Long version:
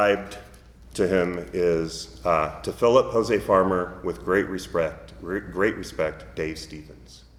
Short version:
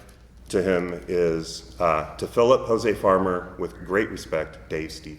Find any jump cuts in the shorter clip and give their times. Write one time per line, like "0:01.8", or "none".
0:03.8